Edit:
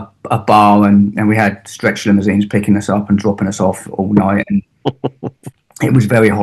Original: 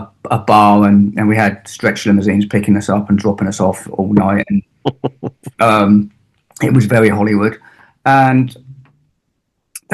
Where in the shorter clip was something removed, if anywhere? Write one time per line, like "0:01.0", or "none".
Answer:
0:05.4